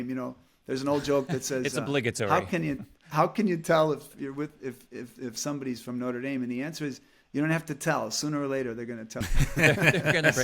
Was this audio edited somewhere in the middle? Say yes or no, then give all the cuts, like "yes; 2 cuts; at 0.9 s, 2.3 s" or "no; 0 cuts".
yes; 1 cut; at 9.2 s